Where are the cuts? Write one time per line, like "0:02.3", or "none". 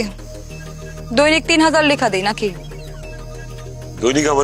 none